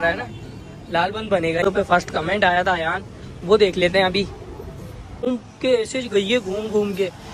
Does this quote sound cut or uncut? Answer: cut